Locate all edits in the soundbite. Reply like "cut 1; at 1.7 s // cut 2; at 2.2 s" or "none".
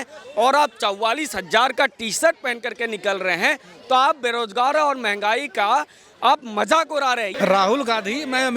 cut 1; at 7.3 s